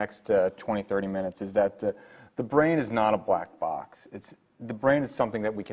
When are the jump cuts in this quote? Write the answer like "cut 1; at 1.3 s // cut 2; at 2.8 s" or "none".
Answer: cut 1; at 3.2 s